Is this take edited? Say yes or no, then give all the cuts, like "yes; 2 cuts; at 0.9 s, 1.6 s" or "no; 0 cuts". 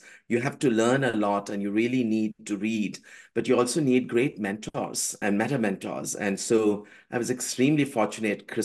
yes; 1 cut; at 5.2 s